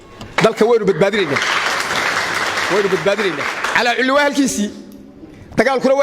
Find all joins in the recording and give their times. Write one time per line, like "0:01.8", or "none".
0:03.6

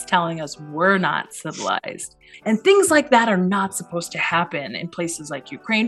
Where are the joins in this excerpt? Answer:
0:02.3

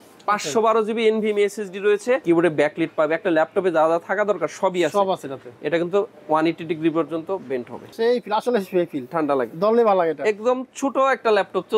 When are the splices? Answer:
0:02.2
0:07.8

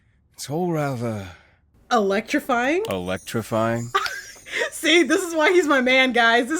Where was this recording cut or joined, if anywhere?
none

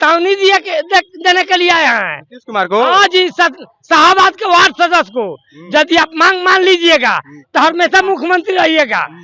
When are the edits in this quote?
none

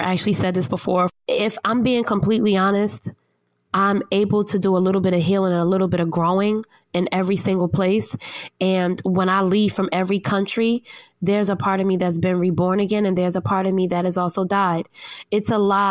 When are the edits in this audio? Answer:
0:01.1

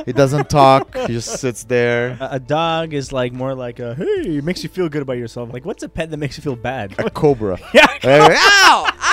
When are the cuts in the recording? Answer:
0:02.3
0:05.4
0:06.9

